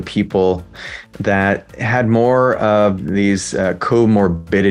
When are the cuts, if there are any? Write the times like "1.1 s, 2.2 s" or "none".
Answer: none